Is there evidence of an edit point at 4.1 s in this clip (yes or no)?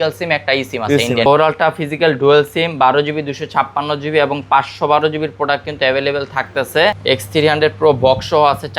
no